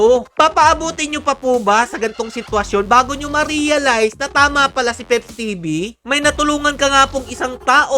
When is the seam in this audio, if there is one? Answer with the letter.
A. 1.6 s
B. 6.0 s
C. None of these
B